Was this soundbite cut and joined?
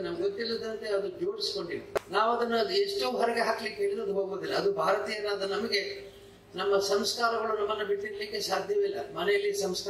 yes; 1 cut; at 2.0 s

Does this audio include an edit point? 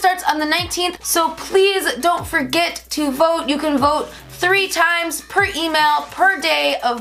yes; 1 cut; at 1.0 s

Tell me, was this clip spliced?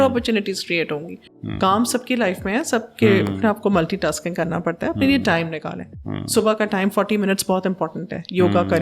yes; 1 cut; at 1.1 s

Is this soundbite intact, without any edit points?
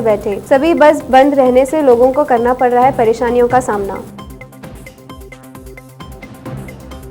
yes; 0 cuts

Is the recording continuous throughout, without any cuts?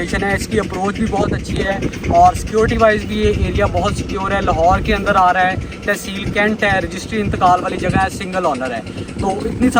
yes; 0 cuts

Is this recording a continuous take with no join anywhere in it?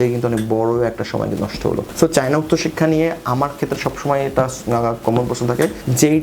no; 1 cut; at 1.9 s

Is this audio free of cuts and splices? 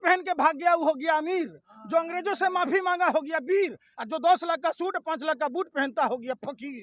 yes; 0 cuts

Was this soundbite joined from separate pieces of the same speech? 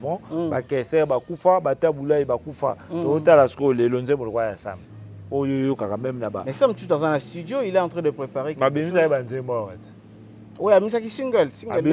no; 0 cuts

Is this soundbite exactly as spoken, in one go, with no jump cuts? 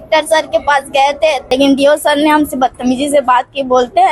no; 1 cut; at 1.4 s

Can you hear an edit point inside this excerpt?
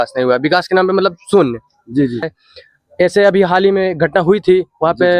yes; 1 cut; at 2.3 s

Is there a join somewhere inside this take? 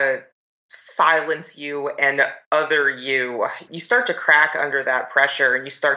yes; 1 cut; at 3.7 s

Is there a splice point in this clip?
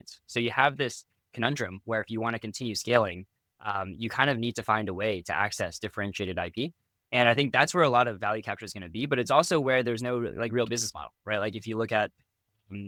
no; 0 cuts

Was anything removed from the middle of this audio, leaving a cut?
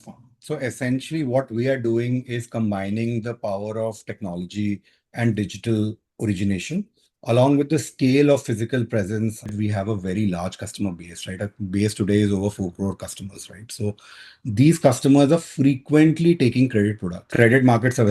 yes; 2 cuts; at 9.5 s, 17.3 s

